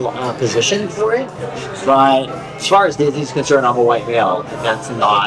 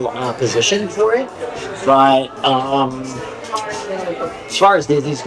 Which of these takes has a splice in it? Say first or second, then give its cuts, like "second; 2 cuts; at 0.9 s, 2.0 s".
first; 1 cut; at 2.3 s